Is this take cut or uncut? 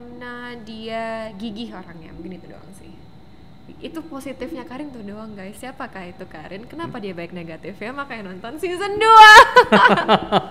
uncut